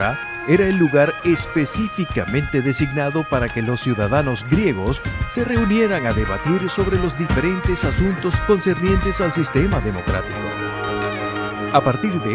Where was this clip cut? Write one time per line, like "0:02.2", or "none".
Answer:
none